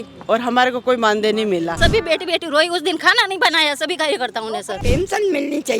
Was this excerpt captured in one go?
no; 2 cuts; at 1.8 s, 4.8 s

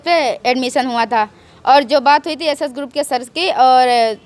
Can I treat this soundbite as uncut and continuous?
yes; 0 cuts

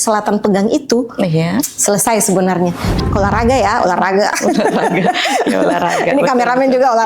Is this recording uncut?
no; 1 cut; at 3.0 s

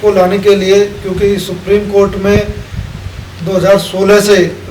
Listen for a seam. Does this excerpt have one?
no; 0 cuts

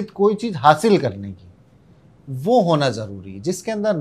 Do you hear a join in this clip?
no; 0 cuts

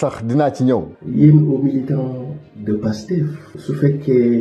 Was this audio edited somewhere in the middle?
yes; 1 cut; at 0.9 s

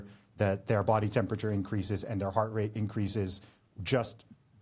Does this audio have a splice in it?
no; 0 cuts

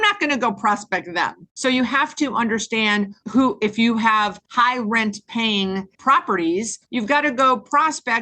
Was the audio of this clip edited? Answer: yes; 5 cuts; at 1.4 s, 3.2 s, 4.4 s, 5.9 s, 6.8 s

